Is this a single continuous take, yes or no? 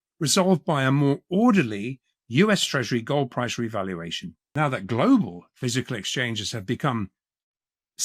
no